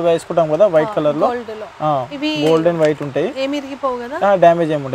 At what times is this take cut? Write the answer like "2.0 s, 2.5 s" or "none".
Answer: none